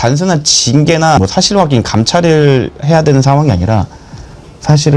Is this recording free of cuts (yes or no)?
no